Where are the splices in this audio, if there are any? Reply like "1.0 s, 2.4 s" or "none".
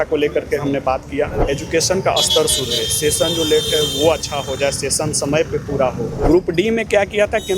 1.4 s, 6.2 s